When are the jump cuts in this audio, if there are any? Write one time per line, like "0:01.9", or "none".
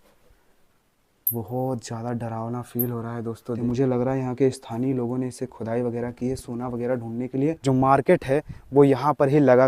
0:03.6
0:07.6